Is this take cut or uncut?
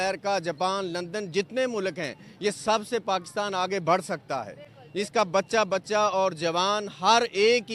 uncut